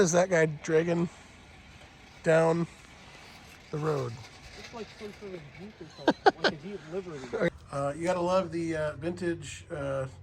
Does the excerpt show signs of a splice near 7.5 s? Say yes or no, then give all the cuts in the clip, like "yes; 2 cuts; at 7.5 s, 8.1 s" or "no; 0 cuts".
yes; 1 cut; at 7.5 s